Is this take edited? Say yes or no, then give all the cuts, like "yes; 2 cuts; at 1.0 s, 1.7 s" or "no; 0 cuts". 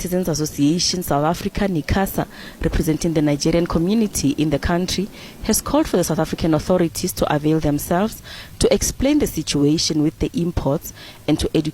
no; 0 cuts